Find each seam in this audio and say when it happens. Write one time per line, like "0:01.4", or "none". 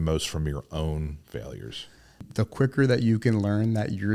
0:02.3